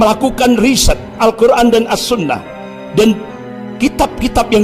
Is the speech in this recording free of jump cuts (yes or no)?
no